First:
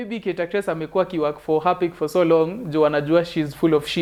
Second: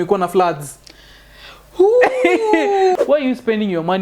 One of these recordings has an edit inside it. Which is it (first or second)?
second